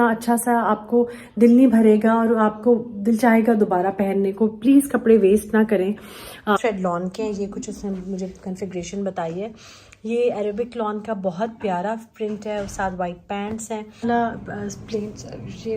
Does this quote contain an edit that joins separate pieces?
yes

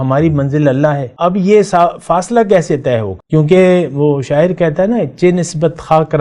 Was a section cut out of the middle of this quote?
yes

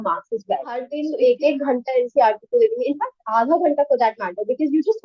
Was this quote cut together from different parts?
yes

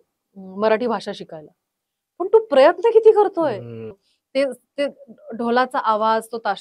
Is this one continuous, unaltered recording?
no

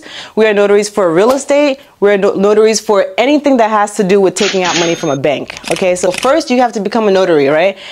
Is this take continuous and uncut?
no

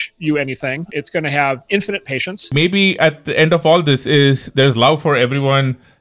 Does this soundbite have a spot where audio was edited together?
yes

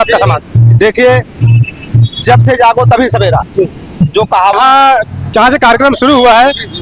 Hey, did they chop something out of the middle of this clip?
yes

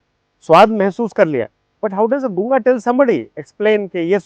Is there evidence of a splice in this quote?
no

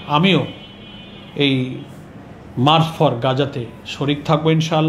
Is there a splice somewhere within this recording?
no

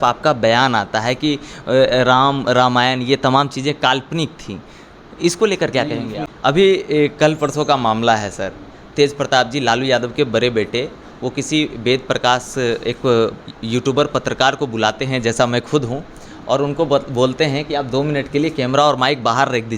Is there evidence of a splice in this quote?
yes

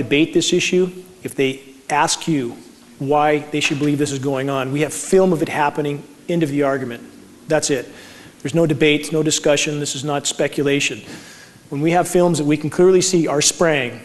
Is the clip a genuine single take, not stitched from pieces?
yes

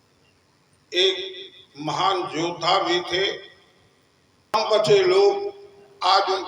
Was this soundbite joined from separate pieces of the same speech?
yes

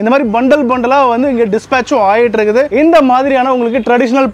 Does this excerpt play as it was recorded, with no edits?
no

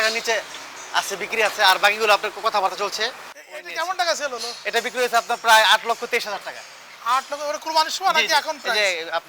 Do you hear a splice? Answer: yes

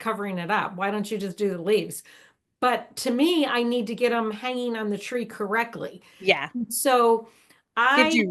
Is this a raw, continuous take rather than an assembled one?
yes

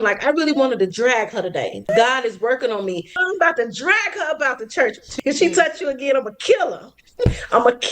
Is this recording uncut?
no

